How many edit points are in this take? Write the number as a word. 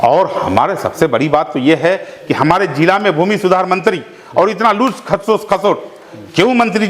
zero